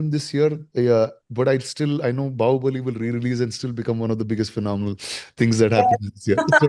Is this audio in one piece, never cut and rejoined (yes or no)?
yes